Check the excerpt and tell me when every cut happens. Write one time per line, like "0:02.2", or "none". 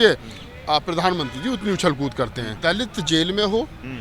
0:02.5